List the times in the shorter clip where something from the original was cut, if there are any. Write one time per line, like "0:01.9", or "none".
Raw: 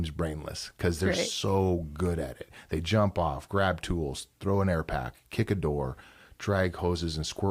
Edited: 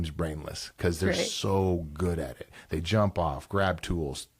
none